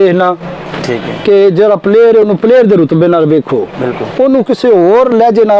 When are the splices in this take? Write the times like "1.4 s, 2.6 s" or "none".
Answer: none